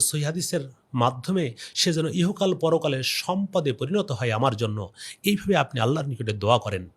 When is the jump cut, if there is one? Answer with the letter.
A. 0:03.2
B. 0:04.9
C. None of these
C